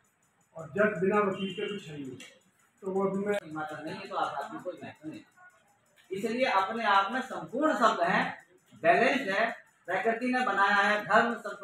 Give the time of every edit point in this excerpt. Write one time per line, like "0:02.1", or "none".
0:03.4